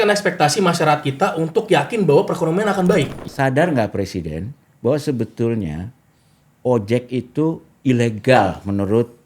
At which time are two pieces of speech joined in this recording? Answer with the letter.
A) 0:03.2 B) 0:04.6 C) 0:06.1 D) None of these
A